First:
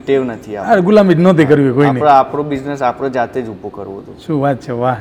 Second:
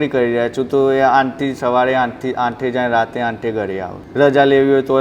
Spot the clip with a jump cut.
second; 1 cut; at 4.0 s

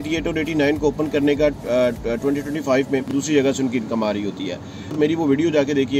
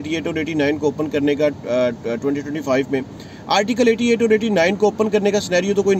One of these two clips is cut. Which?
first; 2 cuts; at 3.1 s, 4.9 s

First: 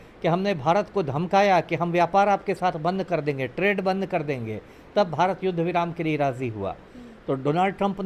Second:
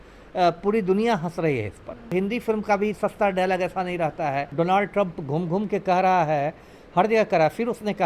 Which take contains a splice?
second; 2 cuts; at 2.1 s, 4.5 s

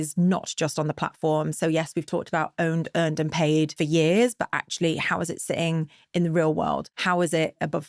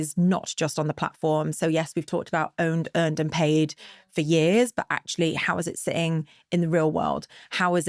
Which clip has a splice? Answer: first; 2 cuts; at 3.7 s, 6.9 s

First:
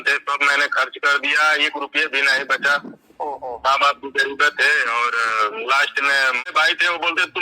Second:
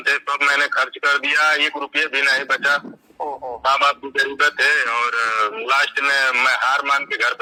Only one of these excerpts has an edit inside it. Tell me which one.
first; 1 cut; at 6.4 s

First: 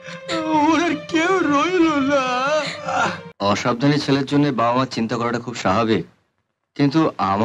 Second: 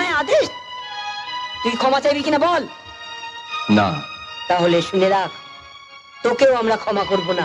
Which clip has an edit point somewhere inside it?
first; 1 cut; at 3.3 s

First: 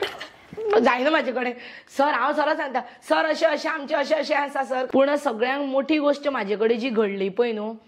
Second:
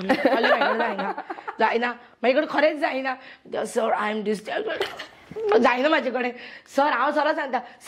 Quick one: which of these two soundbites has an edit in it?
first; 1 cut; at 4.9 s

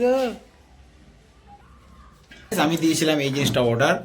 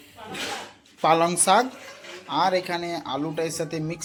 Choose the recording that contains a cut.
first; 1 cut; at 2.5 s

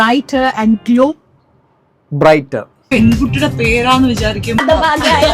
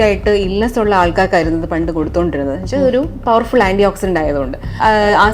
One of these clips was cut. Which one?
first; 1 cut; at 2.8 s

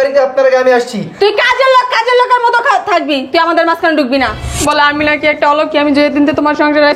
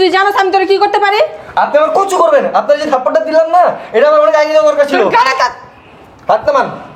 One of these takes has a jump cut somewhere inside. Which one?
first; 1 cut; at 4.5 s

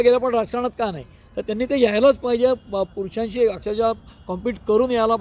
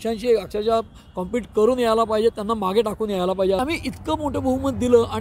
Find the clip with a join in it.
second; 1 cut; at 3.6 s

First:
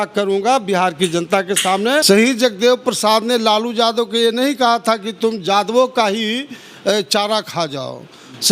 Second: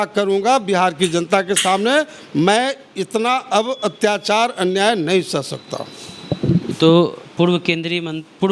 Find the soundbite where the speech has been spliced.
first; 1 cut; at 2.0 s

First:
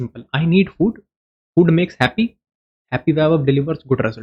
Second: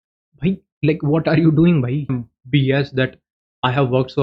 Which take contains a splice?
second; 1 cut; at 2.2 s

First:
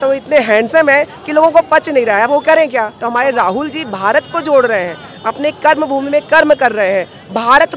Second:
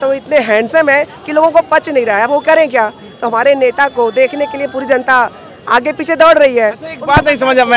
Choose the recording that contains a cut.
first; 1 cut; at 3.0 s

